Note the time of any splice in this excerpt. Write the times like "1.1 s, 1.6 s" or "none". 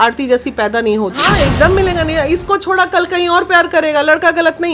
1.3 s